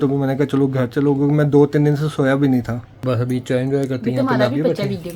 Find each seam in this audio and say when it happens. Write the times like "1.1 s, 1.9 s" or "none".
2.9 s